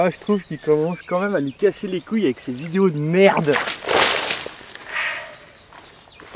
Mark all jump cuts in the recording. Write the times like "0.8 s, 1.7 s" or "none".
5.3 s

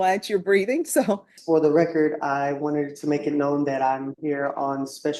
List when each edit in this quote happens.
1.3 s

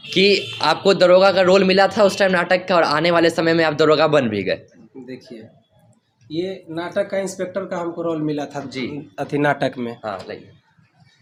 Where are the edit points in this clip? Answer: none

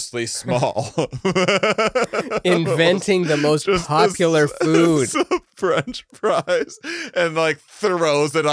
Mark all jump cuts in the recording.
none

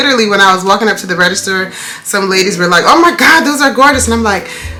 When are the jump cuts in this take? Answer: none

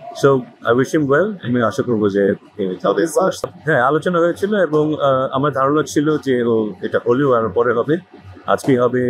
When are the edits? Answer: none

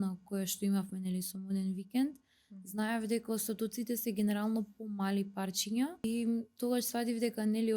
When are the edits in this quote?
6.0 s

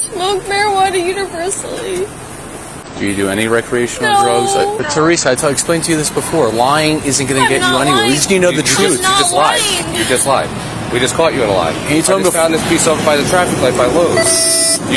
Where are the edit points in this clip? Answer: 4.8 s

